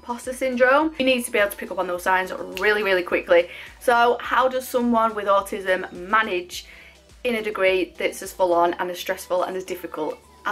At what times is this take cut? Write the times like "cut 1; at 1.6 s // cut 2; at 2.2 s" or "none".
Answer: cut 1; at 1.0 s // cut 2; at 3.6 s